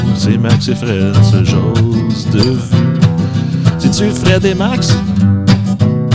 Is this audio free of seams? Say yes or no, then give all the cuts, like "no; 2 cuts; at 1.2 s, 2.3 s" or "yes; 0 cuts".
yes; 0 cuts